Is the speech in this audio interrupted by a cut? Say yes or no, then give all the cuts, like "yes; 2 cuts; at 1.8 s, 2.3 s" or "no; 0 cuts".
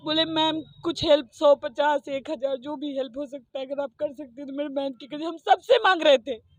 no; 0 cuts